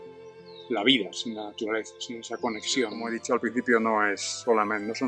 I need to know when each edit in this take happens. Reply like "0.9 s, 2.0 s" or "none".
3.1 s